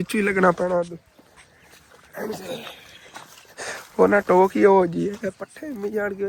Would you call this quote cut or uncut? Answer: uncut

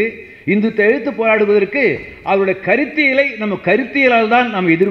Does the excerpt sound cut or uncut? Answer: uncut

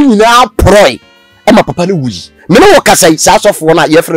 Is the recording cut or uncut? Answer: uncut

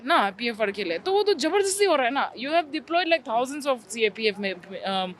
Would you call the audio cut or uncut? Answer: uncut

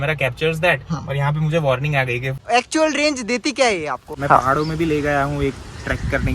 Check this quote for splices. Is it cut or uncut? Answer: cut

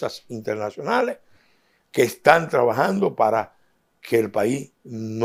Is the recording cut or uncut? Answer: uncut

